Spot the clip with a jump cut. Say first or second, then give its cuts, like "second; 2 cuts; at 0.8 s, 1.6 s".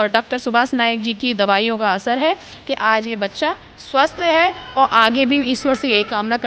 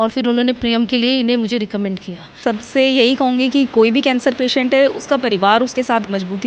second; 1 cut; at 2.3 s